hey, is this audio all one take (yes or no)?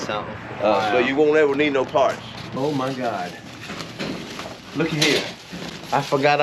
no